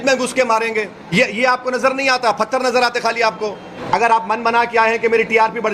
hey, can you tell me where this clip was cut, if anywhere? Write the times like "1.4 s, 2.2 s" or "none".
1.0 s, 3.9 s